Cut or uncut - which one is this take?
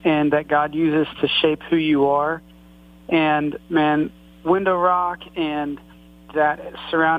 uncut